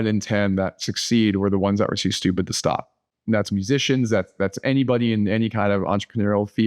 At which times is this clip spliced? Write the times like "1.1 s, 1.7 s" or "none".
none